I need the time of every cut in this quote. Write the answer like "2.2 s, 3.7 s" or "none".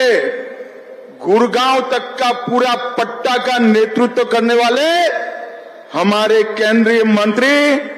none

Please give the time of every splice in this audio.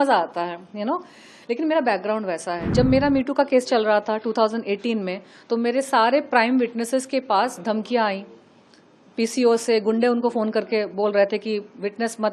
2.6 s

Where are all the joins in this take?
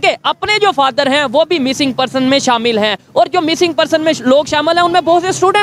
none

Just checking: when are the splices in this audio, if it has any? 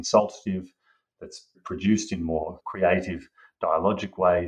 1.6 s, 2.6 s

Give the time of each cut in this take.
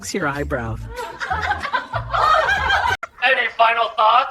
3.1 s

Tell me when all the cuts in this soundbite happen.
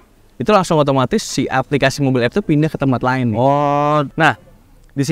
4.1 s

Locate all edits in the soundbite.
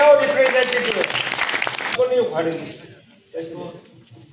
1.9 s

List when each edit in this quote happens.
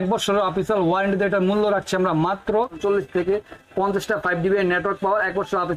2.8 s

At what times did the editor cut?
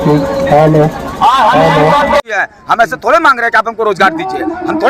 2.4 s

